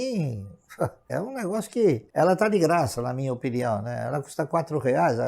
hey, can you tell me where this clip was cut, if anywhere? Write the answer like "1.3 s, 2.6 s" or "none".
1.1 s, 2.1 s

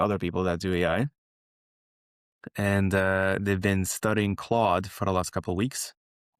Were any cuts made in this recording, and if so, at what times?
none

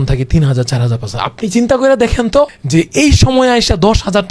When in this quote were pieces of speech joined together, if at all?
2.6 s

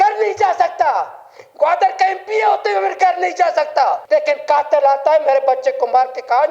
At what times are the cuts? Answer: 4.0 s

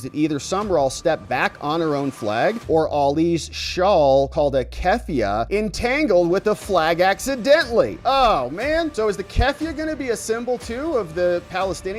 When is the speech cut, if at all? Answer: none

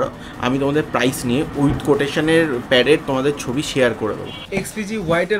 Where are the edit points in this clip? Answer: 4.4 s

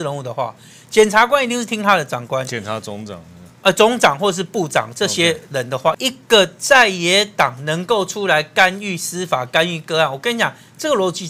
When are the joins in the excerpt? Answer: 5.8 s

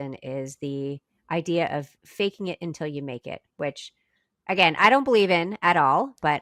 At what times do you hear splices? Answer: none

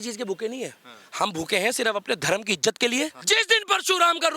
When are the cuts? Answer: 3.2 s

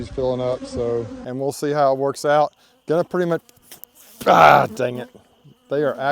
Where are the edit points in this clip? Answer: 1.2 s

